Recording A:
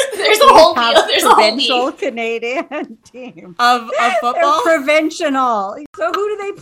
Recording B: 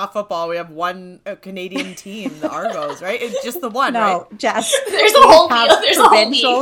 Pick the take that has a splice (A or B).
B